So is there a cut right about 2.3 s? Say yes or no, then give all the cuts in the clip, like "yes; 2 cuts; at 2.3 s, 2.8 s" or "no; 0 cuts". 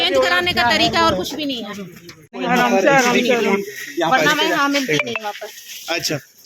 yes; 1 cut; at 2.3 s